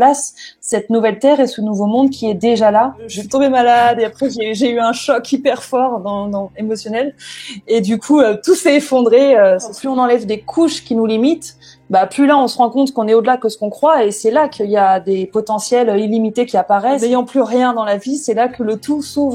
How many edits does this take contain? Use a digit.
3